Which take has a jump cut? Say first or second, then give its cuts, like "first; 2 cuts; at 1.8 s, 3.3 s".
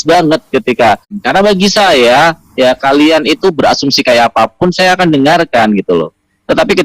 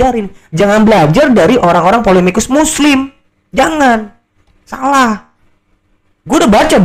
first; 1 cut; at 1.2 s